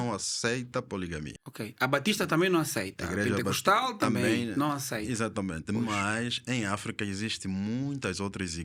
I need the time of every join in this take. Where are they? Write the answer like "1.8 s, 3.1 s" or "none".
none

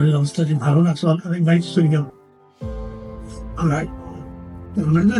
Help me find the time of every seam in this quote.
none

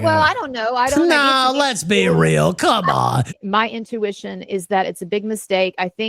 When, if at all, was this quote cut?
3.3 s

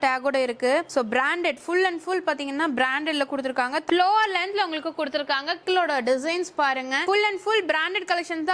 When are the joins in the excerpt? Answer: 3.8 s, 5.6 s

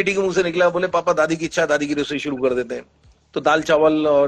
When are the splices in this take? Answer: none

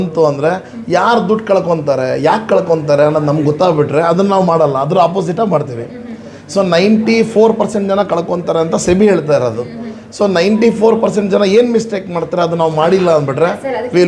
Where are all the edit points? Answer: none

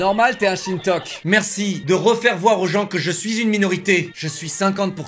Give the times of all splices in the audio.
1.1 s, 4.1 s

